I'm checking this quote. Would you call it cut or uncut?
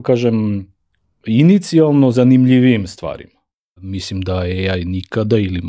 cut